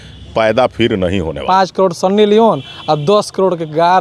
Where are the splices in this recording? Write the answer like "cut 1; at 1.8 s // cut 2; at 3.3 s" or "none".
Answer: cut 1; at 1.4 s